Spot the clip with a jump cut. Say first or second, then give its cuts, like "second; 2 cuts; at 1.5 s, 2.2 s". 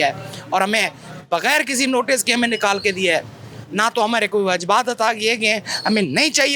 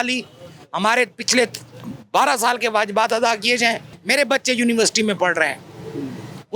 second; 1 cut; at 3.9 s